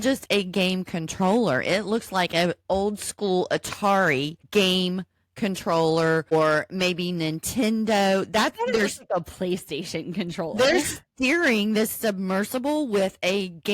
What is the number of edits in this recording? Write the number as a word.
two